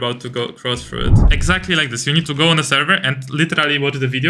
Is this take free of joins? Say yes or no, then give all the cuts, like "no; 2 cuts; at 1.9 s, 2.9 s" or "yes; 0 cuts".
no; 1 cut; at 1.3 s